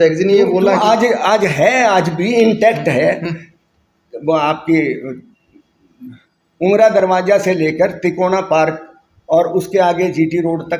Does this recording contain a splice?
no; 0 cuts

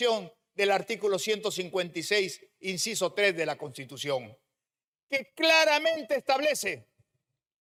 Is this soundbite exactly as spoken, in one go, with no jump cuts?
yes; 0 cuts

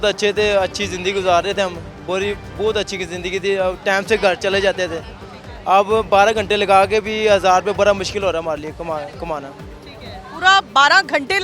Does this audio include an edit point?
no; 0 cuts

